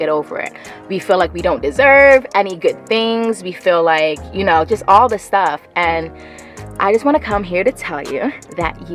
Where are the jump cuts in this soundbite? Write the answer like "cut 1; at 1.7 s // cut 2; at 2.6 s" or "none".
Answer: none